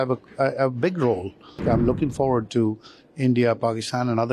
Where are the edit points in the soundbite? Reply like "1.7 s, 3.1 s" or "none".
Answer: 1.5 s